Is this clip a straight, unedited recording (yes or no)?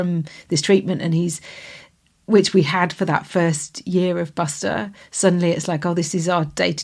yes